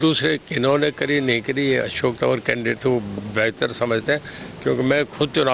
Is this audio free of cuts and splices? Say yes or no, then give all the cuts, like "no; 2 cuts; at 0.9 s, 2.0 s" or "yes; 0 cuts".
yes; 0 cuts